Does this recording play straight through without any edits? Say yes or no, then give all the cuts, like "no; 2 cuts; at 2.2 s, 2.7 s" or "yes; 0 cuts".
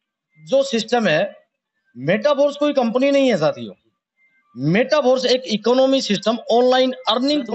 yes; 0 cuts